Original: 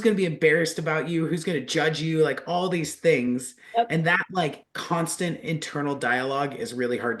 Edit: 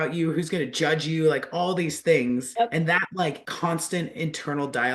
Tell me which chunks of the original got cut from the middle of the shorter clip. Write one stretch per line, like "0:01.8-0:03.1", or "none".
0:03.0-0:03.2
0:04.6-0:04.7